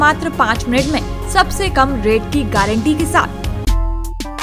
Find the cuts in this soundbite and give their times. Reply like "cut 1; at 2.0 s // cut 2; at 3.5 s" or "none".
cut 1; at 3.4 s